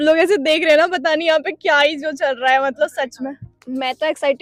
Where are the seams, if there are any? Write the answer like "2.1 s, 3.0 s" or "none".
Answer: none